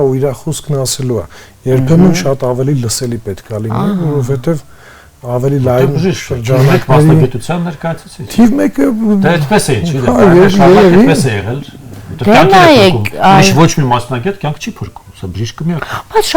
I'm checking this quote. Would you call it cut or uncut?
uncut